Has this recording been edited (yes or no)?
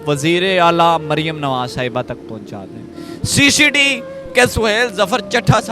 yes